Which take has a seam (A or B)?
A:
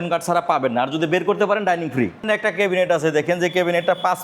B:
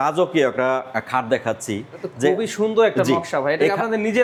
A